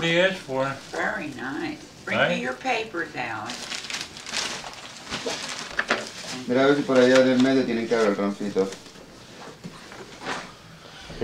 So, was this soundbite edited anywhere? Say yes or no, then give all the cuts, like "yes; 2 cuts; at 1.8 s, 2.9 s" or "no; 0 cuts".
no; 0 cuts